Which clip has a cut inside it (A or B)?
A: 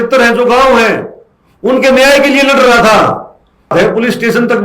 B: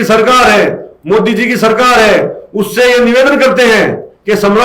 A